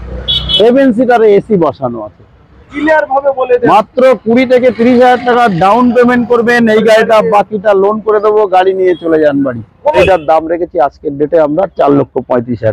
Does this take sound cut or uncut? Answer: cut